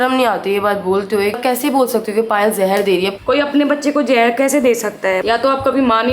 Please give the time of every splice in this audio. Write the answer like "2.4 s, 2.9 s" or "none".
1.4 s, 3.2 s, 5.2 s

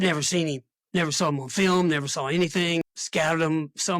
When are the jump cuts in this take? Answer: 2.8 s

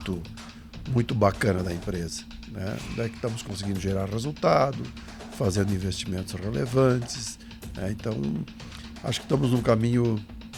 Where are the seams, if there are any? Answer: none

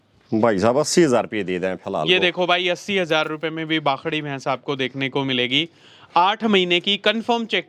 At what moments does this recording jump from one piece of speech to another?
none

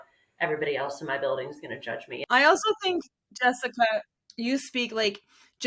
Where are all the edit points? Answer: 2.2 s

